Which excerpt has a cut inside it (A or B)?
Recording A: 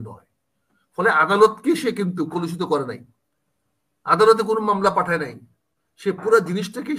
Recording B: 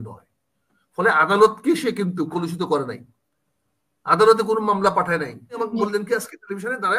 B